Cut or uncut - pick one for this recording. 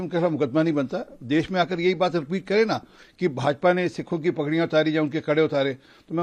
uncut